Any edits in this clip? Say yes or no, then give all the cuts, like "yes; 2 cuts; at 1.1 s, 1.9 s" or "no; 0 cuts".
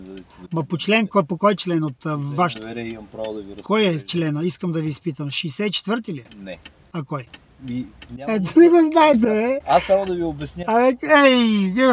no; 0 cuts